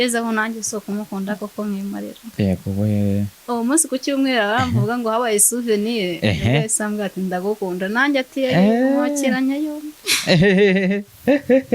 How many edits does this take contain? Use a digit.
1